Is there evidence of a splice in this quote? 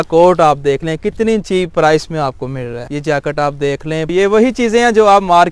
yes; 2 cuts; at 2.8 s, 4.1 s

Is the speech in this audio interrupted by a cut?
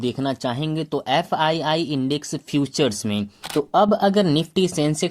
yes; 1 cut; at 3.4 s

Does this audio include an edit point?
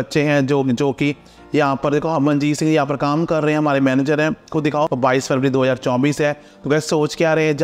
yes; 1 cut; at 4.9 s

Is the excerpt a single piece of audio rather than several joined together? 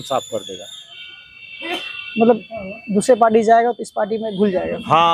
yes; 0 cuts

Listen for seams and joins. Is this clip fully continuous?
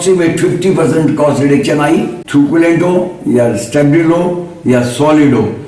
no; 1 cut; at 2.2 s

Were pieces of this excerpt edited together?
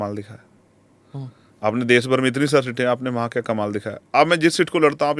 no; 0 cuts

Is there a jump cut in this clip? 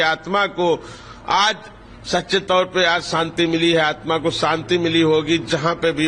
no; 0 cuts

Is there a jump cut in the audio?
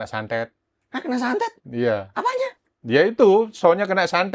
no; 0 cuts

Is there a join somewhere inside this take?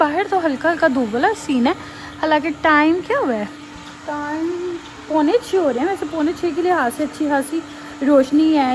no; 0 cuts

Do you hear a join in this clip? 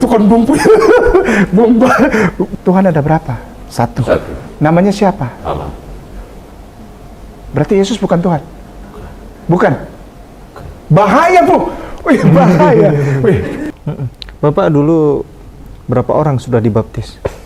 yes; 2 cuts; at 2.5 s, 13.6 s

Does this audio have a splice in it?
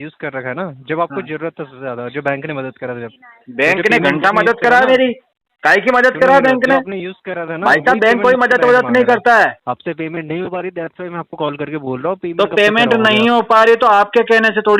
yes; 1 cut; at 9.6 s

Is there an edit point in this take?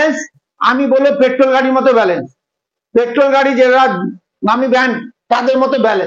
no; 0 cuts

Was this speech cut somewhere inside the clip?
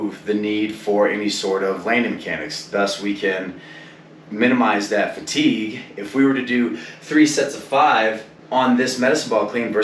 yes; 1 cut; at 8.3 s

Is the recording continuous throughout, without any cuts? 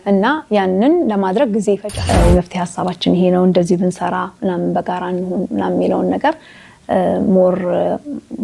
no; 1 cut; at 1.9 s

